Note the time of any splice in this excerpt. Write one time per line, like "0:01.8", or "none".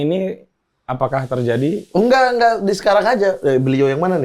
none